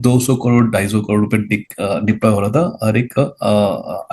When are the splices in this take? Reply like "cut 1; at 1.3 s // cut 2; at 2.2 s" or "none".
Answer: none